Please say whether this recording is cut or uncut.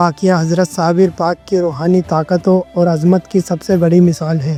uncut